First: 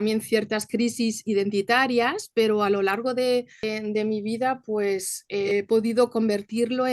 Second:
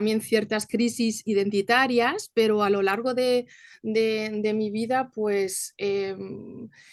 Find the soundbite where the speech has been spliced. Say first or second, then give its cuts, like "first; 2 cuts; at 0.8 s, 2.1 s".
first; 2 cuts; at 3.6 s, 5.5 s